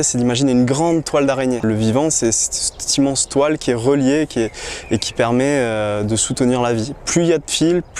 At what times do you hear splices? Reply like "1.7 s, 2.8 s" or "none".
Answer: 1.6 s